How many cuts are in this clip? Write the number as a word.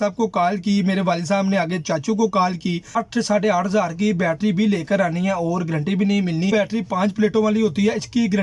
two